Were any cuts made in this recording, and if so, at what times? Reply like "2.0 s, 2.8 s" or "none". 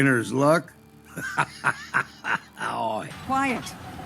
3.1 s